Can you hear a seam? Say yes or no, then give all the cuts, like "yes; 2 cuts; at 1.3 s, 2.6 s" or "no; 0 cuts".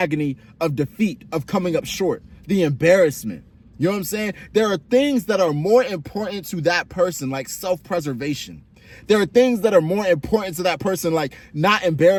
no; 0 cuts